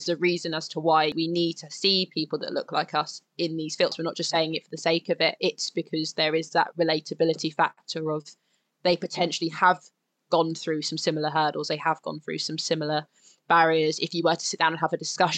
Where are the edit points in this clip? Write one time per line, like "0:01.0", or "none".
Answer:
0:01.2
0:03.9

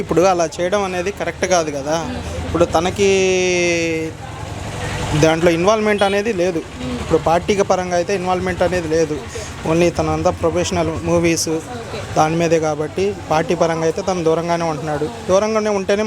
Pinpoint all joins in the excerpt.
none

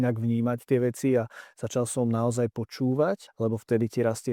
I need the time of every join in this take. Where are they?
0:03.3

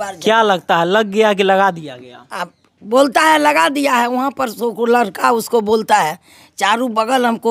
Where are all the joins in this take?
none

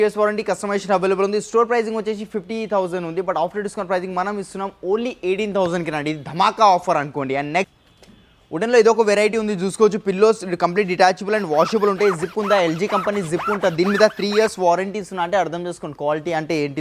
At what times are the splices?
none

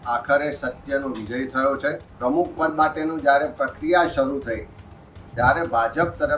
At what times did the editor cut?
0:02.1

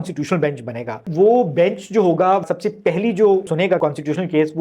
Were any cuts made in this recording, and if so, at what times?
0:01.1
0:02.5
0:03.6

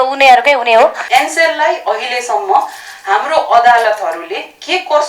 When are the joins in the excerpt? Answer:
0:01.0

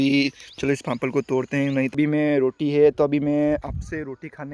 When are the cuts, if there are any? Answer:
0:01.9

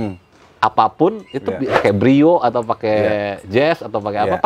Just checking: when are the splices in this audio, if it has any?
0:01.8

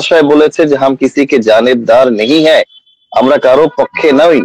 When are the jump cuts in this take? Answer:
none

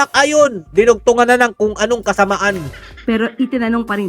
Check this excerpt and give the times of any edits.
none

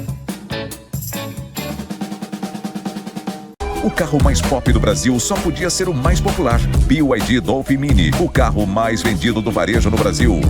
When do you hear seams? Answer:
0:03.5

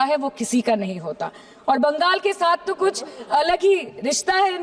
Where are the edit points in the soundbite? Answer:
none

